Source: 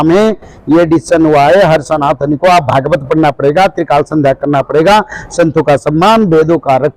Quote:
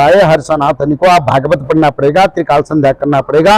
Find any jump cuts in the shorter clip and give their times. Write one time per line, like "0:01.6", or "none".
none